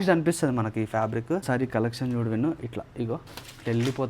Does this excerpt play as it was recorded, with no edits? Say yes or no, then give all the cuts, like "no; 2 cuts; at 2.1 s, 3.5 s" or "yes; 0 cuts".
no; 1 cut; at 1.4 s